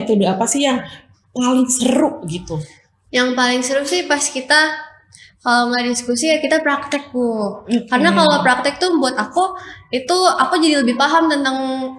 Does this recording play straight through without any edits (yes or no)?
yes